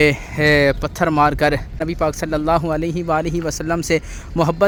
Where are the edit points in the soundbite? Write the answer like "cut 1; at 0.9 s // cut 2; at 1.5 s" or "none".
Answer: none